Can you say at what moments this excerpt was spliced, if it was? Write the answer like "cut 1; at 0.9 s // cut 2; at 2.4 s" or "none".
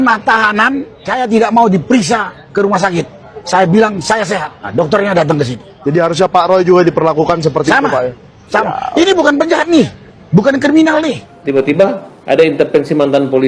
cut 1; at 1.0 s // cut 2; at 2.4 s // cut 3; at 4.6 s // cut 4; at 5.7 s // cut 5; at 11.3 s // cut 6; at 12.1 s